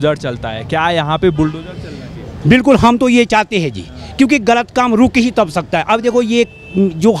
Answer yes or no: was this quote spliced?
no